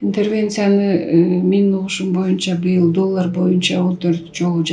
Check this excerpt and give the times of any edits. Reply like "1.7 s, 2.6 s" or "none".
none